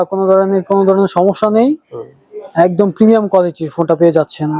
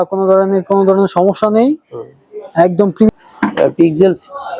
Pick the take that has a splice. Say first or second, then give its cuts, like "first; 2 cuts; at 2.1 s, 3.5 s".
second; 1 cut; at 3.1 s